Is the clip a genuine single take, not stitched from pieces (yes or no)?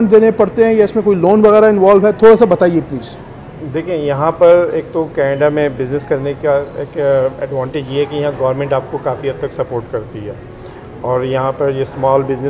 yes